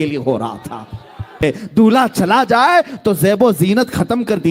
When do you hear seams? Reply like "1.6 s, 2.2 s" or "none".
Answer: 1.4 s